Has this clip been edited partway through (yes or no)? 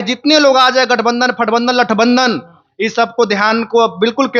no